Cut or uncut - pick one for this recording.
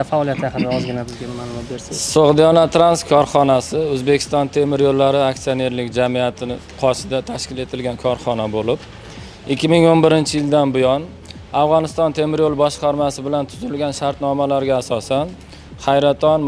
uncut